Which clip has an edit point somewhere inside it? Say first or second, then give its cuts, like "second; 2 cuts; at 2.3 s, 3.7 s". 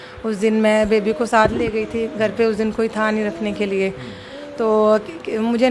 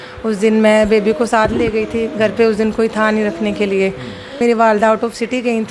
second; 1 cut; at 4.4 s